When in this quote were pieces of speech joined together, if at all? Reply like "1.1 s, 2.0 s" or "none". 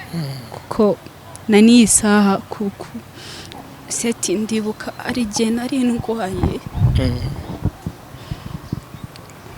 3.5 s